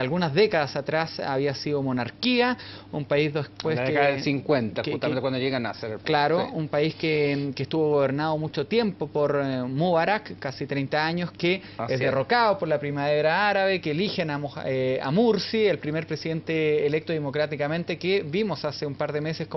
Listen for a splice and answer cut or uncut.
uncut